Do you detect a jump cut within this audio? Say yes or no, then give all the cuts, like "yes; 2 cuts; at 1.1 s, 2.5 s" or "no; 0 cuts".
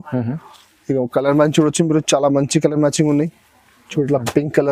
no; 0 cuts